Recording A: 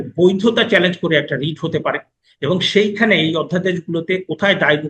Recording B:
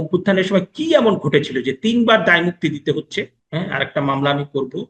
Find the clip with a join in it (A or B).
B